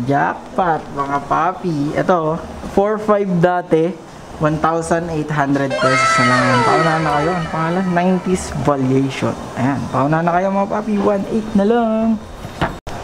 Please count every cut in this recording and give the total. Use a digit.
0